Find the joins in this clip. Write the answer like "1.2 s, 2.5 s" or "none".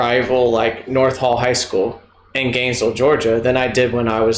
none